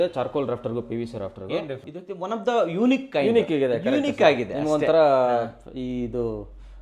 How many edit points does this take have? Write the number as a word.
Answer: one